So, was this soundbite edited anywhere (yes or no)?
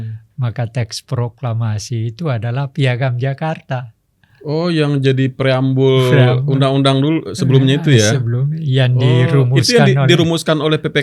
no